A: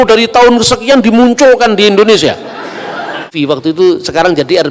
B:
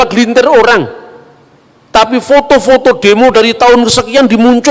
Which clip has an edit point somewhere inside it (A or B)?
A